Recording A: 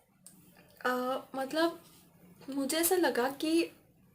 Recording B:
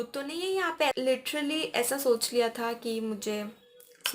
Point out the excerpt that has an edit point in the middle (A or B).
B